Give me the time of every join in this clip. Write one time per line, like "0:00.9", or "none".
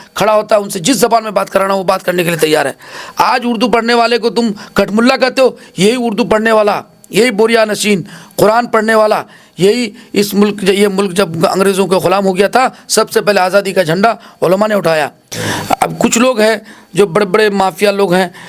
0:03.0
0:15.2